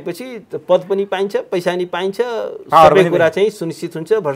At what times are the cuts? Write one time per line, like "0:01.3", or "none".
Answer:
none